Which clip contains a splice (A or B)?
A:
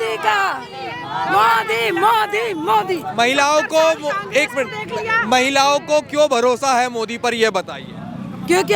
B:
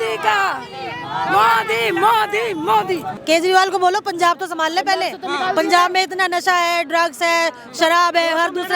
B